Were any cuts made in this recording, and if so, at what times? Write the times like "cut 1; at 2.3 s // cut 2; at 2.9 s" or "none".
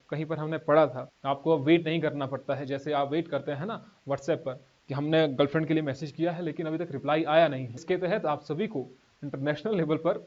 cut 1; at 1.1 s // cut 2; at 7.8 s

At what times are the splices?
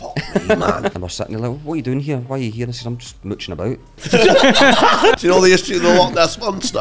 cut 1; at 1.0 s // cut 2; at 4.0 s // cut 3; at 5.2 s

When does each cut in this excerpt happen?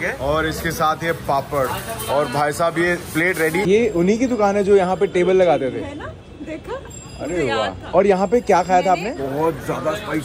cut 1; at 3.7 s // cut 2; at 9.2 s

